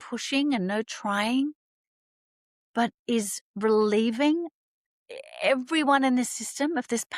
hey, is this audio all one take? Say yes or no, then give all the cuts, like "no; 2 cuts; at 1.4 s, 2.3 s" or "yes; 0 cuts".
yes; 0 cuts